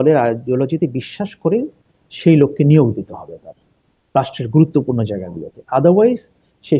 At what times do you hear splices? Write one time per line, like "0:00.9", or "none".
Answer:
none